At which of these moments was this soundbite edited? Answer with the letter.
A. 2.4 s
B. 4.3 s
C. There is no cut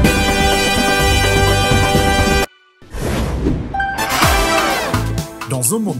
A